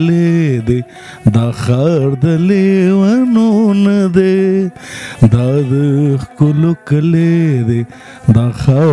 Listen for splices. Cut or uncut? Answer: uncut